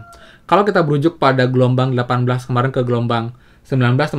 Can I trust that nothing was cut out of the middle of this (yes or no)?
yes